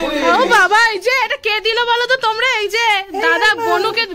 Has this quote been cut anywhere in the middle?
no; 0 cuts

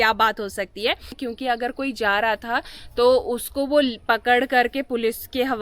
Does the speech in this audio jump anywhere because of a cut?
yes; 1 cut; at 1.2 s

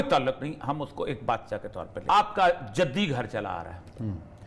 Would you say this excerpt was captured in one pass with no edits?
no; 1 cut; at 1.9 s

